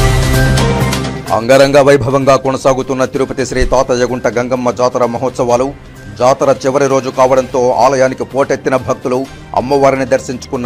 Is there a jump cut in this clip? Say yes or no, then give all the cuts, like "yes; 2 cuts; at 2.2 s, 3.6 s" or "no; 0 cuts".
yes; 1 cut; at 1.1 s